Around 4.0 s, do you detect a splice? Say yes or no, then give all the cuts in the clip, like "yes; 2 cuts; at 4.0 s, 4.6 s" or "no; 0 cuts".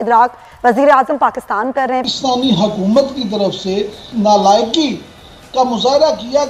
yes; 2 cuts; at 2.0 s, 4.0 s